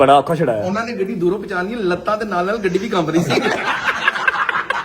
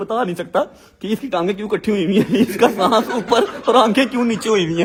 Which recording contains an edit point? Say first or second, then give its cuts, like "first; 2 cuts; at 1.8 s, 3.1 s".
first; 1 cut; at 3.7 s